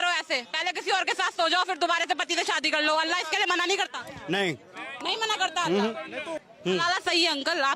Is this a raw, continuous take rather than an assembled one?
no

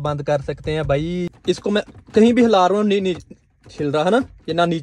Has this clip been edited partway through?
yes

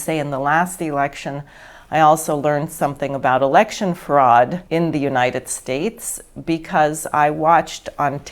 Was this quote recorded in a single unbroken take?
no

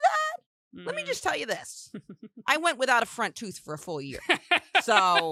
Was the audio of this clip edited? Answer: no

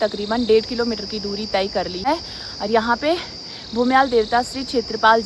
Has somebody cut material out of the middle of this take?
yes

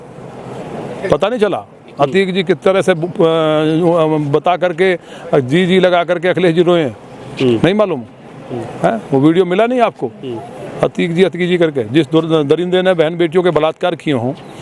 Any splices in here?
no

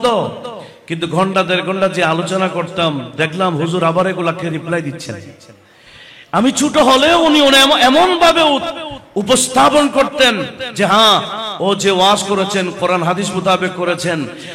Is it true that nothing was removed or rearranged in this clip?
yes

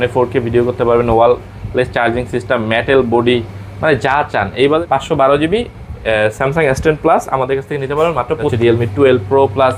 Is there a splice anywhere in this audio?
yes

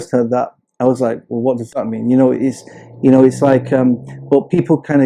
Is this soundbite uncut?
yes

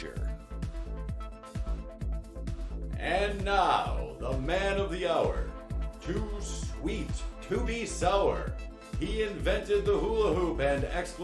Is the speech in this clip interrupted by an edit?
no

